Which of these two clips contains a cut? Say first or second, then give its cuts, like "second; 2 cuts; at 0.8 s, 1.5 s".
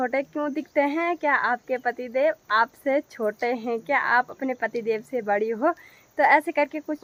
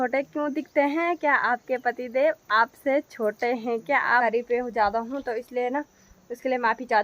second; 1 cut; at 4.2 s